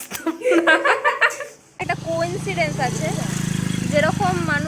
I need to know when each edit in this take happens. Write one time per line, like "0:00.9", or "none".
0:01.7